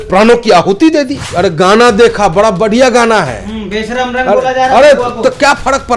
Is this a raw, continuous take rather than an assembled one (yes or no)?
no